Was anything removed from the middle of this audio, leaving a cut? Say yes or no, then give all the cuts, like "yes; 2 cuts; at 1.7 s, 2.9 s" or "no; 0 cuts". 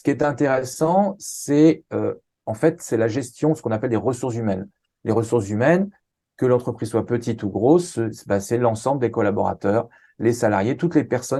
no; 0 cuts